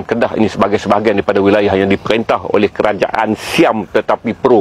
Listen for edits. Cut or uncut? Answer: uncut